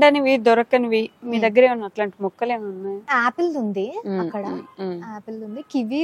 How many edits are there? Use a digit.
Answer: 1